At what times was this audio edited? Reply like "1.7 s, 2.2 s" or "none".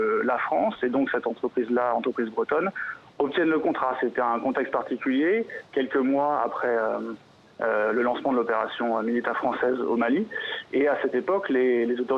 none